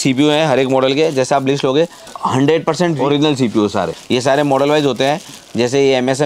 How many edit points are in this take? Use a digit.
3